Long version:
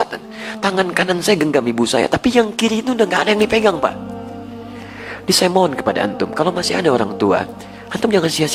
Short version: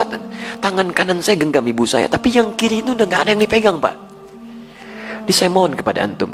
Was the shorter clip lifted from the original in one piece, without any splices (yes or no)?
yes